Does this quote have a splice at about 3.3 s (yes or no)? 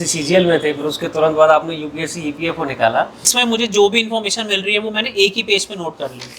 yes